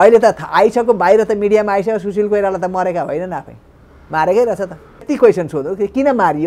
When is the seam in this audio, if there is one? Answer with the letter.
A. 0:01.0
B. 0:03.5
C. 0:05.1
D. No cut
C